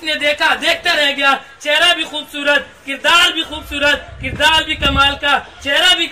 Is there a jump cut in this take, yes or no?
no